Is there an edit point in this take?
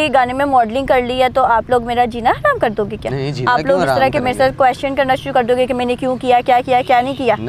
no; 0 cuts

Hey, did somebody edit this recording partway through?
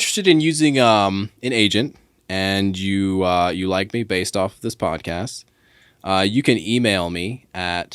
no; 0 cuts

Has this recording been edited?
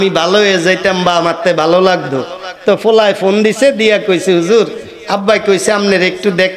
no; 0 cuts

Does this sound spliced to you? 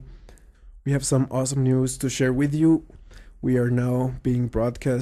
no; 0 cuts

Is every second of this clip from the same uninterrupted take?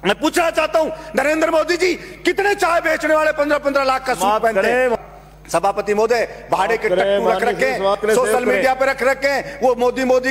no; 1 cut; at 5.0 s

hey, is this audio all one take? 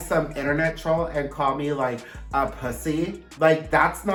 yes; 0 cuts

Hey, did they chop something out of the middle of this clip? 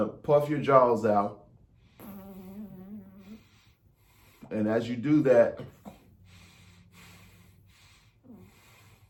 no; 0 cuts

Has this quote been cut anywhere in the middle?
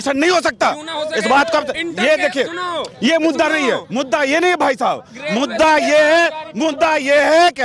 no; 0 cuts

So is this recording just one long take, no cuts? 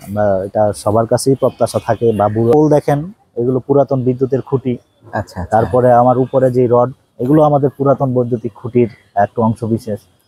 no; 1 cut; at 2.5 s

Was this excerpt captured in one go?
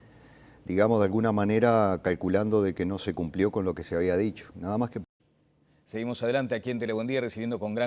yes; 0 cuts

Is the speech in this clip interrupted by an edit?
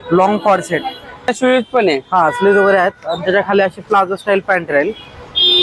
yes; 1 cut; at 1.3 s

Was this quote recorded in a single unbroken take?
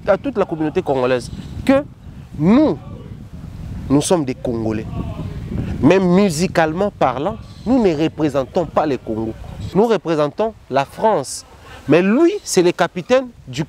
no; 1 cut; at 9.6 s

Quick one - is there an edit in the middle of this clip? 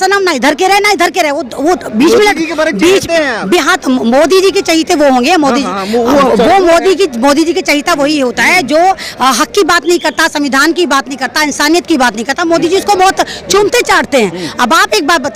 no; 0 cuts

